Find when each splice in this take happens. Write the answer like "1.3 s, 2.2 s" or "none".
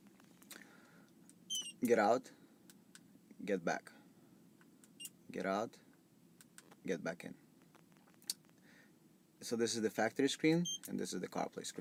none